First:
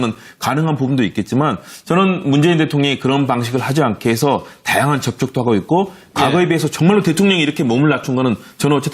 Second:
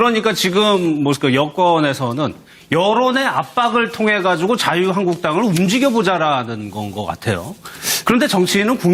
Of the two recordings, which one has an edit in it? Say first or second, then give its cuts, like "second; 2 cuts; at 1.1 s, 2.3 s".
first; 1 cut; at 0.9 s